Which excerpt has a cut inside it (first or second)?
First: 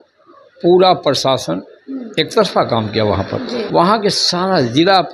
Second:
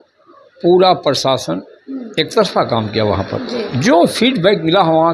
first